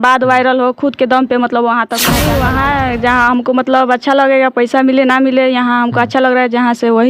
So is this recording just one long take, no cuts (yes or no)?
no